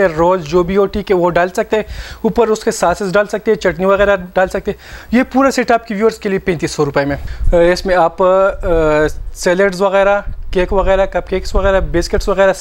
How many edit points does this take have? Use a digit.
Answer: 1